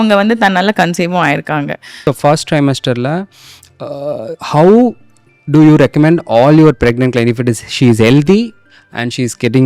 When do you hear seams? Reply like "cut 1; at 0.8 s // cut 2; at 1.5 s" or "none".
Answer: cut 1; at 1.9 s